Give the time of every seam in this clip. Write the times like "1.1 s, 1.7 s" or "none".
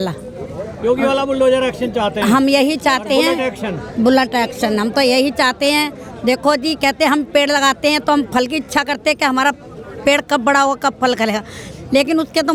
none